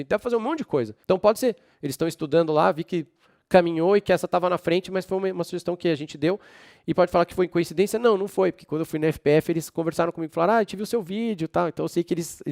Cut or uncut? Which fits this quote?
cut